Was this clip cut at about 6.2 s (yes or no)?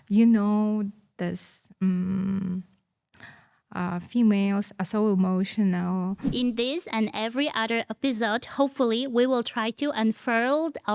yes